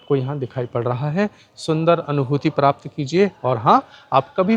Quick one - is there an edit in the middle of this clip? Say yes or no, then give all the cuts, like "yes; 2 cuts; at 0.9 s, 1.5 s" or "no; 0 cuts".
no; 0 cuts